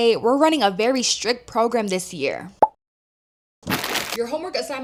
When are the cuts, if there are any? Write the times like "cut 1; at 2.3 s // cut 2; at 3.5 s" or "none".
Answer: none

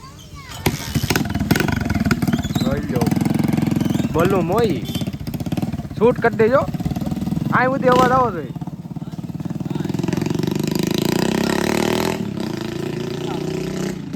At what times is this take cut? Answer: none

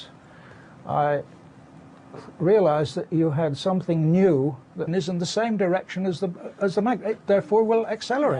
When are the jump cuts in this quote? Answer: none

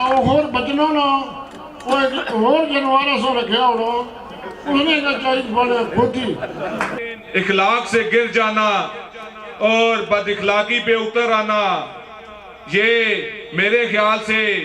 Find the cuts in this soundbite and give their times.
cut 1; at 6.9 s

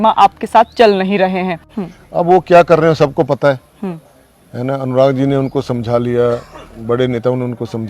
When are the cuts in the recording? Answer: cut 1; at 1.6 s

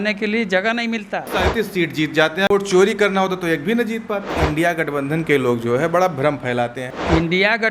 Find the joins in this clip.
cut 1; at 1.3 s // cut 2; at 2.5 s // cut 3; at 4.4 s // cut 4; at 6.8 s

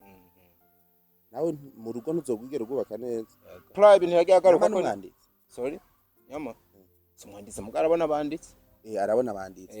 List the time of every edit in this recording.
cut 1; at 3.7 s

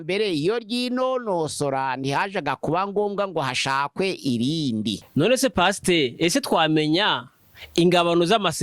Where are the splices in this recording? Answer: cut 1; at 5.0 s

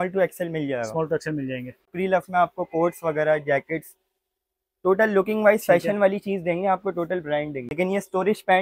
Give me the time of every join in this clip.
cut 1; at 1.9 s // cut 2; at 7.7 s

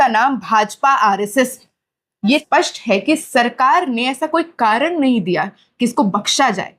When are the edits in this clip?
cut 1; at 2.4 s

